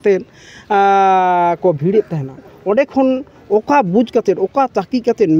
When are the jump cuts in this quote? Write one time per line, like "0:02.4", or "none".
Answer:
none